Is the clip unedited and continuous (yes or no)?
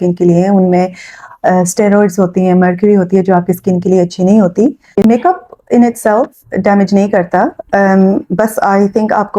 no